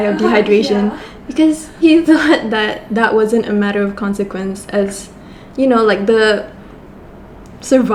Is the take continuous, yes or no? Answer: yes